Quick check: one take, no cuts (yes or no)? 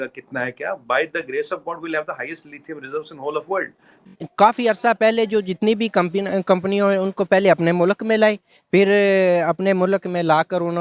no